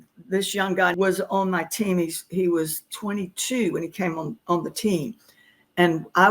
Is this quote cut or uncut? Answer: cut